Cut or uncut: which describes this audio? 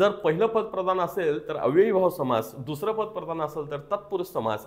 uncut